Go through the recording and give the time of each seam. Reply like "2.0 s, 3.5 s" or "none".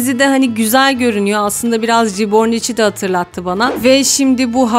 3.7 s